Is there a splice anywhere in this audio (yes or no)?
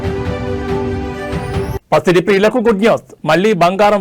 no